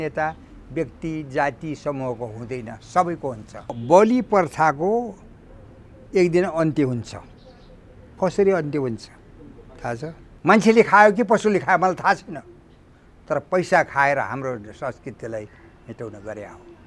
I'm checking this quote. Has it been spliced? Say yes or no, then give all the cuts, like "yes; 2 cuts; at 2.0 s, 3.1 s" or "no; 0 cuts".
yes; 2 cuts; at 3.7 s, 10.3 s